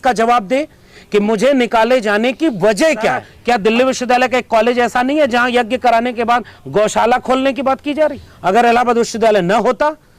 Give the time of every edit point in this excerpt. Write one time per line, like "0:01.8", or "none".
0:03.3
0:08.3